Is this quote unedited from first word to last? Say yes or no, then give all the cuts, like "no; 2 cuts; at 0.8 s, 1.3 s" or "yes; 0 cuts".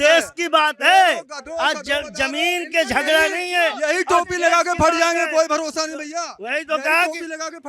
yes; 0 cuts